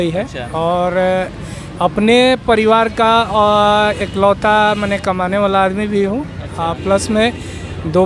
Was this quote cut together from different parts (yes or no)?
no